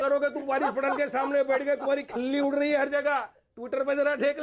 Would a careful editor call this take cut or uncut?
uncut